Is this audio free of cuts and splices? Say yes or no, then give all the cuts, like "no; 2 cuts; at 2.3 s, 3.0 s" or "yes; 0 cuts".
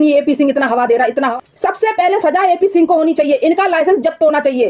no; 1 cut; at 1.3 s